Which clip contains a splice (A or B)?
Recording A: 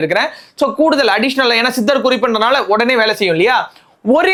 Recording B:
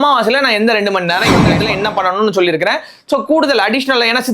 B